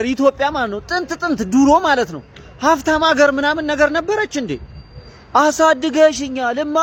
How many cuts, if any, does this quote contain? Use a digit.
0